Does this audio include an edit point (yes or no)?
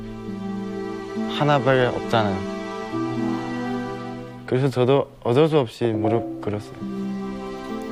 no